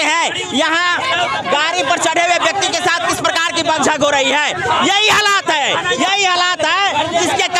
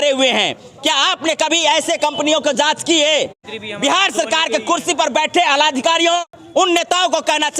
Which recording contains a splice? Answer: second; 2 cuts; at 3.4 s, 6.2 s

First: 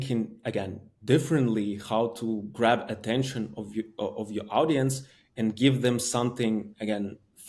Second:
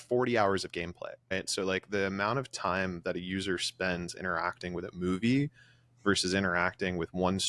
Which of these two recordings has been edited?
second; 1 cut; at 1.3 s

